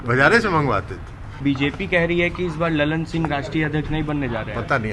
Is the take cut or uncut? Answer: cut